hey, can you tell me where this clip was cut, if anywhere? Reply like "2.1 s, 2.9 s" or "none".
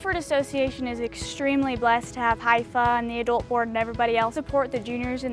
4.4 s